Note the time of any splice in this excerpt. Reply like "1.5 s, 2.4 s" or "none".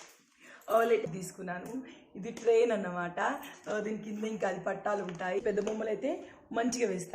1.0 s, 5.4 s